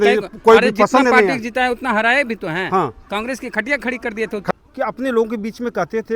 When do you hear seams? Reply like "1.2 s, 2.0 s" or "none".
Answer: 4.5 s